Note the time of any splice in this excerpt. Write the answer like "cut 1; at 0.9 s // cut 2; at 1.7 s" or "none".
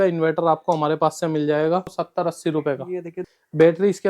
cut 1; at 2.0 s // cut 2; at 3.2 s